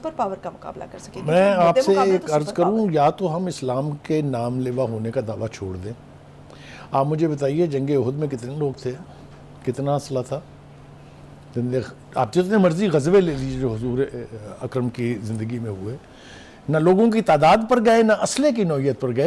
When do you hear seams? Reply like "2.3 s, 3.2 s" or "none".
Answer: none

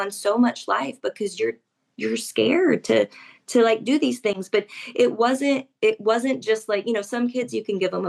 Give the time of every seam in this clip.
none

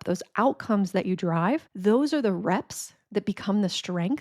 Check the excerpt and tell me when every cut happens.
1.7 s

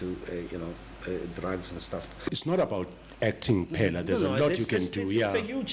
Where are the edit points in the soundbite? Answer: none

